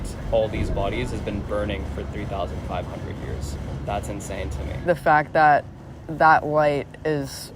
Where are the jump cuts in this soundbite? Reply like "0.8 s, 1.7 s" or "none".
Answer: 3.6 s, 4.9 s